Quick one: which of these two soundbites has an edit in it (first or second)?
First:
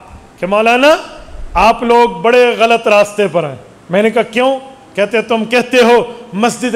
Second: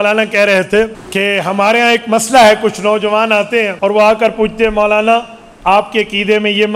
second